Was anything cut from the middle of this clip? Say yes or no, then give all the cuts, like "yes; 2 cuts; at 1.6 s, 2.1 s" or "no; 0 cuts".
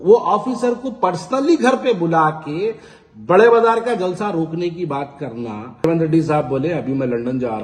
yes; 1 cut; at 5.9 s